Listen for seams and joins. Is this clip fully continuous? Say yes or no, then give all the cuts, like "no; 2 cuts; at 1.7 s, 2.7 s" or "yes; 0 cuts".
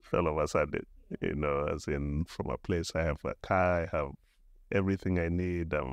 yes; 0 cuts